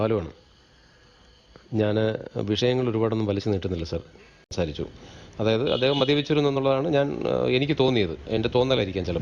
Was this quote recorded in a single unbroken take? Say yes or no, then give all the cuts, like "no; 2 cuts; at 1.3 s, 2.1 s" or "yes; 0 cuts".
yes; 0 cuts